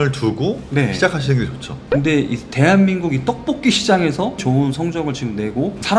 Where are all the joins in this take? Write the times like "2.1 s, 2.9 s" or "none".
1.7 s